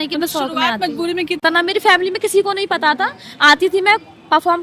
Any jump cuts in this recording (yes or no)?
yes